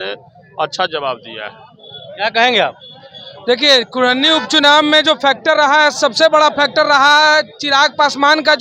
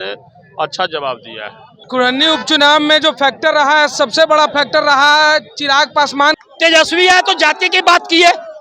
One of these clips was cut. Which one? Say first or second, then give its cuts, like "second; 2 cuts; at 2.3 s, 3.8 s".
second; 2 cuts; at 1.9 s, 6.4 s